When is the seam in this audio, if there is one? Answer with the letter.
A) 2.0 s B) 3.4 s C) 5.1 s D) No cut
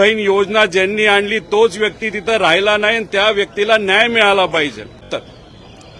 C